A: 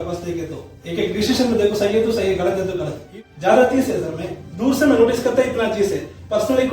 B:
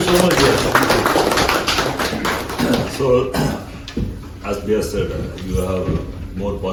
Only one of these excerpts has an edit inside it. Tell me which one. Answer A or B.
A